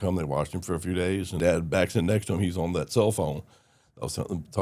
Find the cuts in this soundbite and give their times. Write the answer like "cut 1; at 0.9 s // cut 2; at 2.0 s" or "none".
cut 1; at 1.4 s